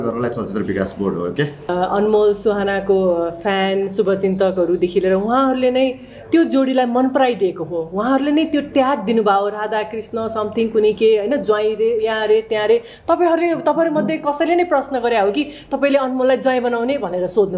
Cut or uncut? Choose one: cut